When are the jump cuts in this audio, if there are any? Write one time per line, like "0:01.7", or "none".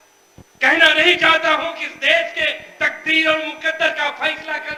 none